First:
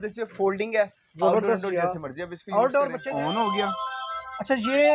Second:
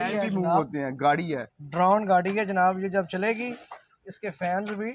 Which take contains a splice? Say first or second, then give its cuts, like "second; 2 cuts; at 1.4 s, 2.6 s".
first; 1 cut; at 3.0 s